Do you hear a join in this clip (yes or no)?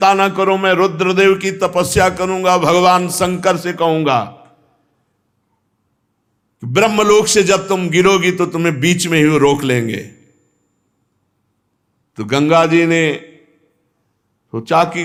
no